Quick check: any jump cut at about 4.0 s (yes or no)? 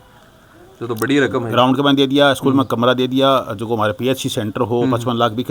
no